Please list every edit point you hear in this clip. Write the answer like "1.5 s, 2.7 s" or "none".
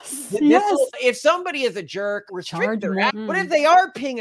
0.9 s, 2.3 s, 3.1 s